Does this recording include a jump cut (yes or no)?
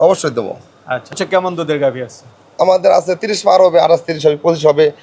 yes